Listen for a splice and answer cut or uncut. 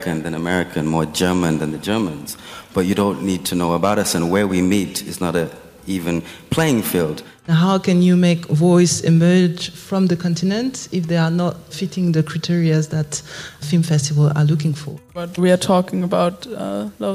cut